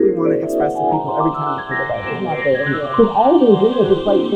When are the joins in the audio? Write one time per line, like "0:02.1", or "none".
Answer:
none